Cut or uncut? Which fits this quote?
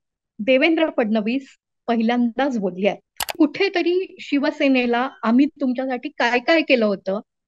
cut